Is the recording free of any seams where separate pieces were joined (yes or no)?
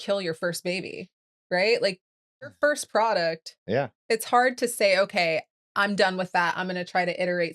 no